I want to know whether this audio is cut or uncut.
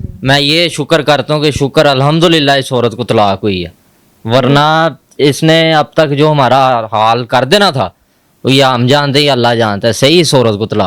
uncut